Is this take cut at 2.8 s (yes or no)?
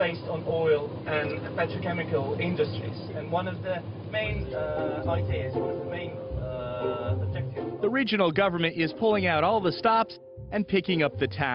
no